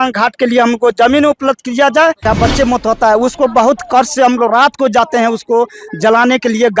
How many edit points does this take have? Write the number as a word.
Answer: one